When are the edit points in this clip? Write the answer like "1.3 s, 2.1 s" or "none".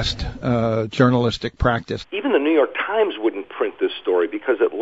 1.9 s